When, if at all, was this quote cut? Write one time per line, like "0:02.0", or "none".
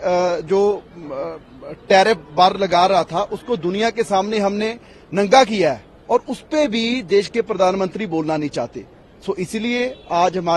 none